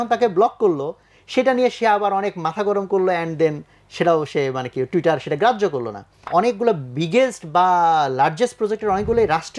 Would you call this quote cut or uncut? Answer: cut